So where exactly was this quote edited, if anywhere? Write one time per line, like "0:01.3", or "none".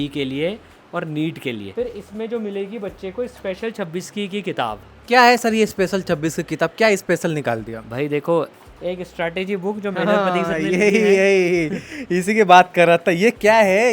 0:01.6
0:08.6